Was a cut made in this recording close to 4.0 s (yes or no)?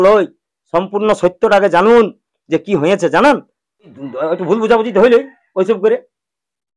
yes